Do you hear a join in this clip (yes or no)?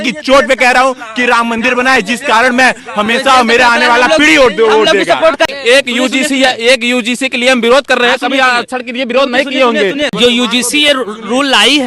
yes